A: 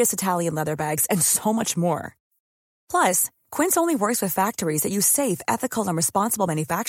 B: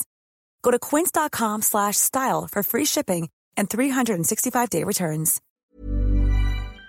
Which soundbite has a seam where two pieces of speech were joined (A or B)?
B